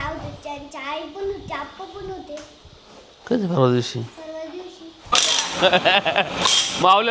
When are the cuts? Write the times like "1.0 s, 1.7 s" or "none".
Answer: 5.2 s

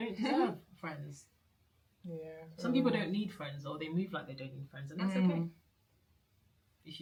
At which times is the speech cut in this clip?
none

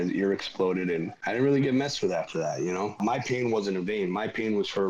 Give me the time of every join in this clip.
1.2 s, 3.0 s

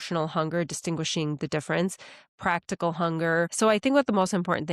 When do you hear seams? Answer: 3.5 s

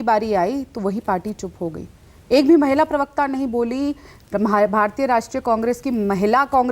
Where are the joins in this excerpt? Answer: none

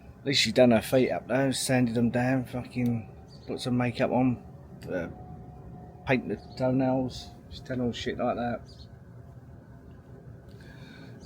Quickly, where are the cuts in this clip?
none

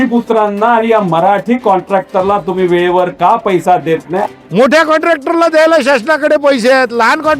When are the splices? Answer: 4.2 s

